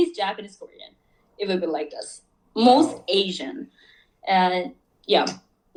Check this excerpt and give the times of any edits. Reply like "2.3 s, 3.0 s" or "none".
none